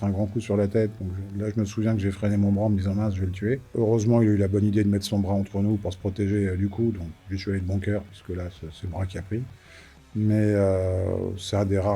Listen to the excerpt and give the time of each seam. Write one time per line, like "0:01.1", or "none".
none